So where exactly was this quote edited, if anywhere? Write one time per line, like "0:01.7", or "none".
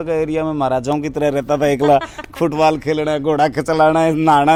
none